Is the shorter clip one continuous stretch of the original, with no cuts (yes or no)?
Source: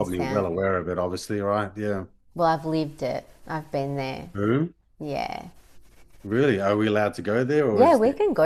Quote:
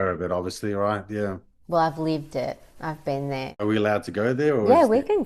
no